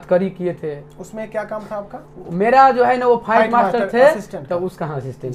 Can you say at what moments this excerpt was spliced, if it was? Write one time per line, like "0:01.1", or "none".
none